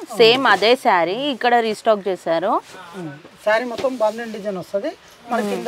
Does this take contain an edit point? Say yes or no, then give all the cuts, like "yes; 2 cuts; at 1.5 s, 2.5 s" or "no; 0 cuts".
no; 0 cuts